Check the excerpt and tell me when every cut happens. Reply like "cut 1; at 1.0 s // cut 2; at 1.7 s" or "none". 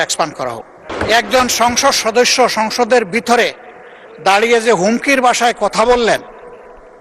cut 1; at 0.9 s